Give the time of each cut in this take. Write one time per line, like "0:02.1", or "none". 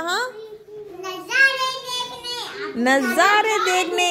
none